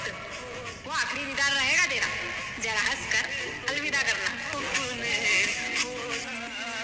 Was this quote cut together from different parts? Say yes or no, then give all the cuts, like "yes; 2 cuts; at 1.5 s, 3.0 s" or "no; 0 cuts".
no; 0 cuts